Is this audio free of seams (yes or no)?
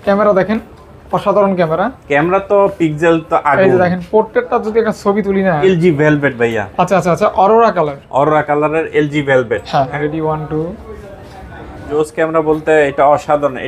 no